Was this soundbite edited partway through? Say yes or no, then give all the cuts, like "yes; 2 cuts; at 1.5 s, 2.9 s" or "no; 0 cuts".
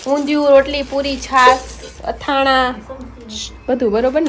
no; 0 cuts